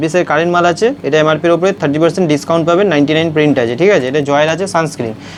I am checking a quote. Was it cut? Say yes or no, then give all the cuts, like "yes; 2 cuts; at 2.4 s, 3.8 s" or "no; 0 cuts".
no; 0 cuts